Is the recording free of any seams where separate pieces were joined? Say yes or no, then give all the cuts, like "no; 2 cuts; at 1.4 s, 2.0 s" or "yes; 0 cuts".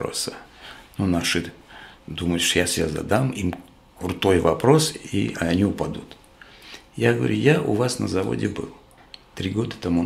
yes; 0 cuts